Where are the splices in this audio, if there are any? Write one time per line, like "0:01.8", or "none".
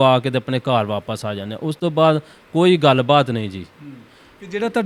none

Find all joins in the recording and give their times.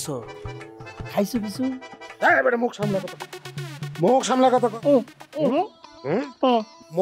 0:05.6

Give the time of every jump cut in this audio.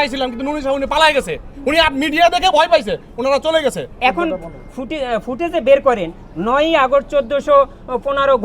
0:03.9

